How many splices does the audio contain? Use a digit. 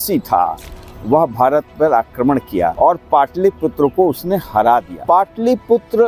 2